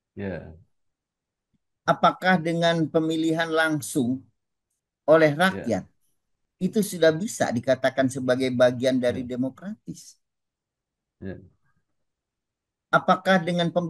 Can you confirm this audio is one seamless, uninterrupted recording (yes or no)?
yes